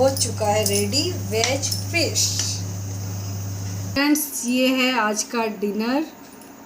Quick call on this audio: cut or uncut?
cut